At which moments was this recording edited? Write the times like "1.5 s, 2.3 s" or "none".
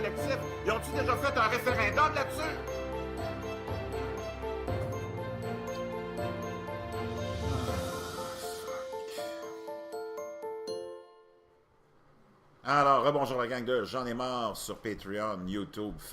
1.7 s